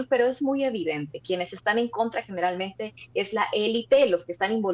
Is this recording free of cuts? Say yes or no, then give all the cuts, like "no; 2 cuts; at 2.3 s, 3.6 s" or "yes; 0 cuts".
yes; 0 cuts